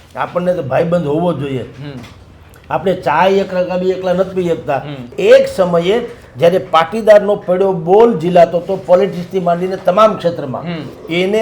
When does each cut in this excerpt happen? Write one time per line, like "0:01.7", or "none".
0:05.0